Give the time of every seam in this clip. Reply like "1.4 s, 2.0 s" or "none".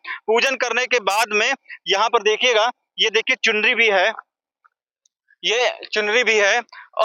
none